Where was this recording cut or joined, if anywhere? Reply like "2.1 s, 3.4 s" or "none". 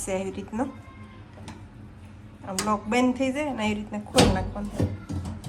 none